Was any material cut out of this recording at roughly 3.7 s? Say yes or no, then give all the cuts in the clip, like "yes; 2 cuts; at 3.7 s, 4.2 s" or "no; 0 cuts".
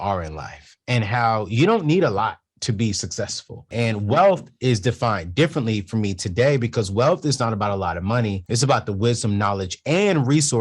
yes; 2 cuts; at 3.7 s, 8.4 s